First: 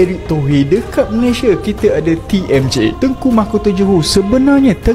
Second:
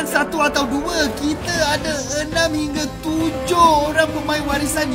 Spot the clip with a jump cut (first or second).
first